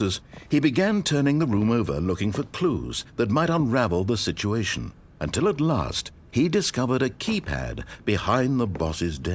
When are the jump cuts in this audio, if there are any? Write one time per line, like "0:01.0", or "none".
0:01.6